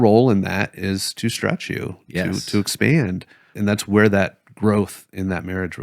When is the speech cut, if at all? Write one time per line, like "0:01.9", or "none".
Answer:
0:03.5